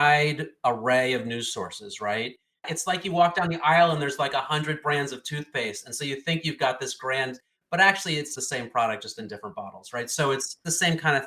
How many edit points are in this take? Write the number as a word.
one